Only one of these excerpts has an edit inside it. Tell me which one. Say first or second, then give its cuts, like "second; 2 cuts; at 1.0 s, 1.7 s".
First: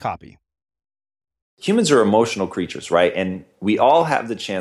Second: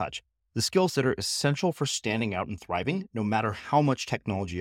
first; 1 cut; at 1.5 s